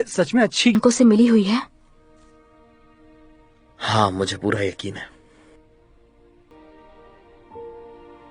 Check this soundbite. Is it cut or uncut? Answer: cut